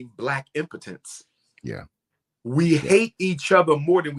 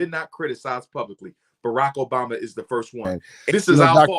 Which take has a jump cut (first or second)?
second